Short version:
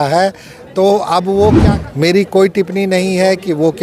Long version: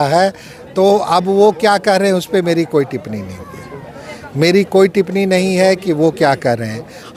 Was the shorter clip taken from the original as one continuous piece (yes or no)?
no